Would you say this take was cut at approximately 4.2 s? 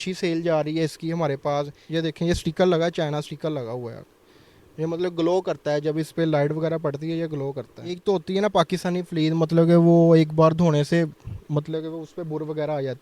no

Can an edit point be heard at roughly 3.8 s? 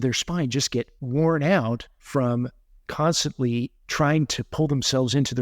yes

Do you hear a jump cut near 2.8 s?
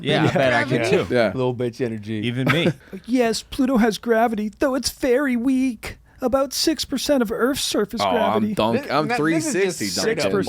yes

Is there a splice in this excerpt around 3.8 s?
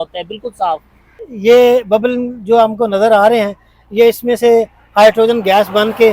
no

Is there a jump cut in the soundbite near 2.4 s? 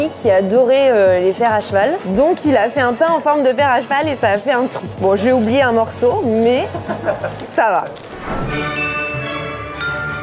no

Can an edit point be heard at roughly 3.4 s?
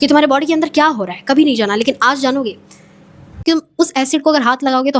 yes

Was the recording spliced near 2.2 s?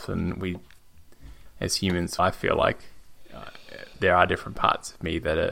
yes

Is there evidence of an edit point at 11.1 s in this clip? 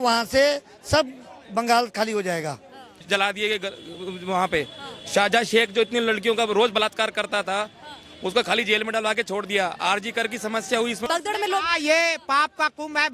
yes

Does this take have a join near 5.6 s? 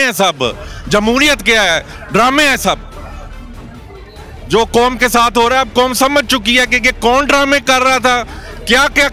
no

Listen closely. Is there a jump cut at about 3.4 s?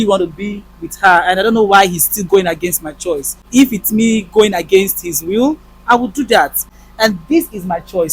yes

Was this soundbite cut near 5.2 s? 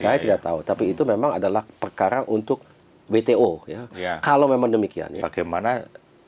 yes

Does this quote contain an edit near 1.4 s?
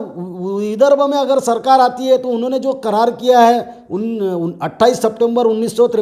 no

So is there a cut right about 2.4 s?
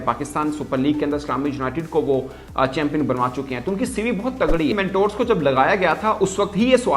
no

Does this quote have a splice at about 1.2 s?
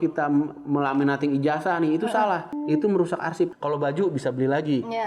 no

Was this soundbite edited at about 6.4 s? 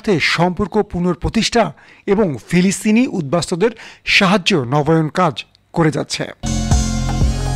yes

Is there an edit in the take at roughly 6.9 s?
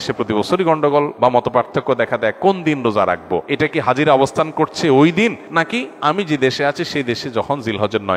no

